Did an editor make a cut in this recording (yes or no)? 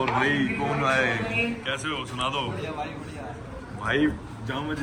no